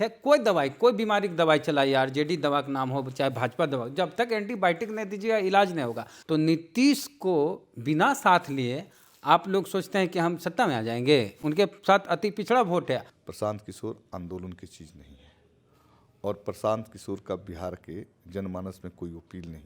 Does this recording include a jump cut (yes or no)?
yes